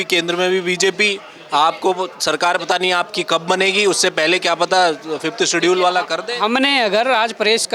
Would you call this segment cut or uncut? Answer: uncut